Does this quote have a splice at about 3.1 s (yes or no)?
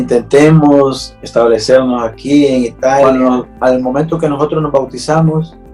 yes